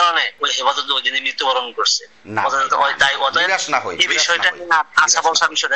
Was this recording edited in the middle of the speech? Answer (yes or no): no